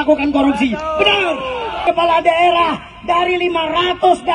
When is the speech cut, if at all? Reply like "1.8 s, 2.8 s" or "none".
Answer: 1.8 s